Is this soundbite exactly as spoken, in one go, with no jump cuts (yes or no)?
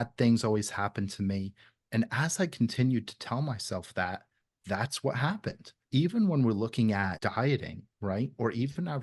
no